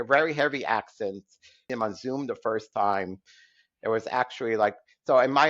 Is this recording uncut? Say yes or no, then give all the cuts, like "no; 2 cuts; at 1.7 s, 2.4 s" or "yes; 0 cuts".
no; 1 cut; at 1.7 s